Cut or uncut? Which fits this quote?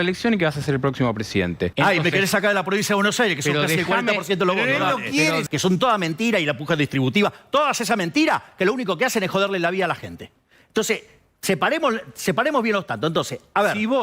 cut